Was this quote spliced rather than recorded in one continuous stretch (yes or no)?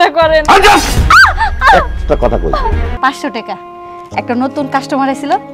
yes